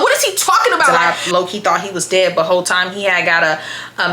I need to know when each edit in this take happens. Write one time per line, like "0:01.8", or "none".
0:01.2